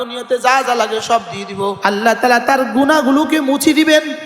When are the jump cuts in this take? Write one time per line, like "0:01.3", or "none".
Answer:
0:01.8